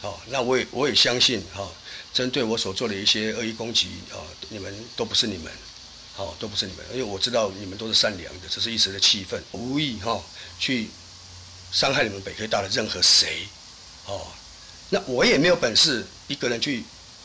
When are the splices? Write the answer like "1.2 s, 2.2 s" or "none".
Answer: 9.6 s

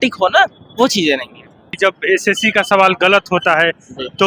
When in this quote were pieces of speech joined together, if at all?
1.8 s

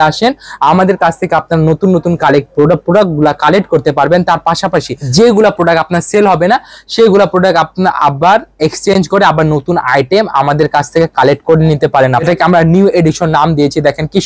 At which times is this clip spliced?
5.0 s, 12.2 s

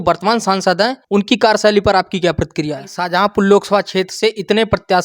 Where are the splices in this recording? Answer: 1.0 s, 2.9 s

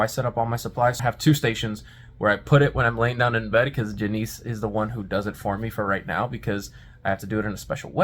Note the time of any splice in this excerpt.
1.0 s

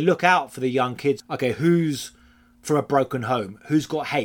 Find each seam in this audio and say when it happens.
1.2 s

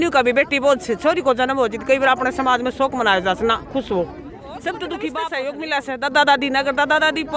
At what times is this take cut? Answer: 5.3 s

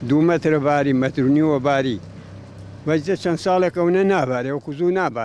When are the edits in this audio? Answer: none

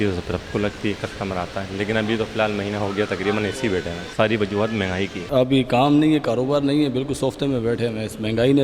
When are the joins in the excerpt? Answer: 4.1 s, 5.2 s

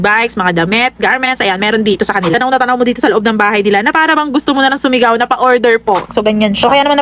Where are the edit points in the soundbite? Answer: 2.3 s, 6.1 s

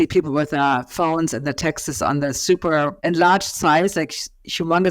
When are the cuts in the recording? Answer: 3.0 s

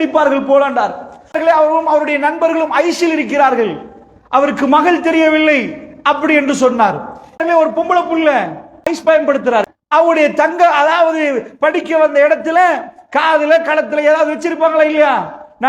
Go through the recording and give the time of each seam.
1.4 s, 7.4 s, 8.9 s, 9.8 s

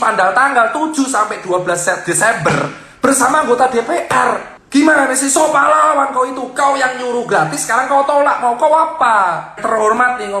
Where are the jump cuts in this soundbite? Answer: 4.5 s, 9.5 s

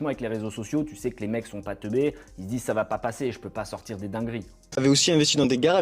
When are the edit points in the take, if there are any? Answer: 4.7 s

